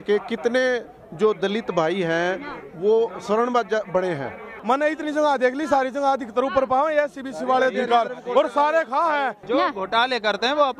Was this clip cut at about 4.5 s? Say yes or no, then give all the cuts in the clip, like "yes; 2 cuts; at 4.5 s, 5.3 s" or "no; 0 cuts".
yes; 2 cuts; at 4.5 s, 9.4 s